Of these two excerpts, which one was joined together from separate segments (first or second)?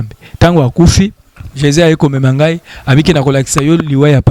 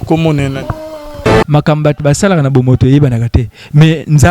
second